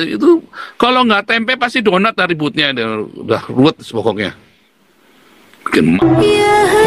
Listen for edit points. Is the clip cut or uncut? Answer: cut